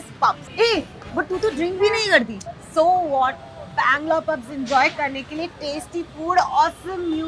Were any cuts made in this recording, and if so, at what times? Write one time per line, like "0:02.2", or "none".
none